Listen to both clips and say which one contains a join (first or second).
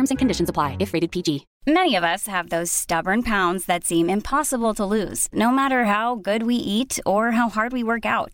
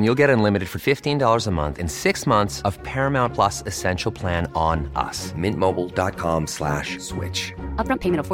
first